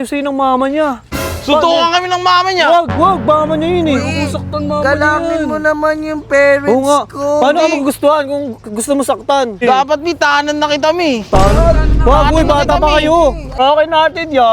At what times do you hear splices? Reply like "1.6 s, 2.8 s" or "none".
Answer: 9.6 s, 13.6 s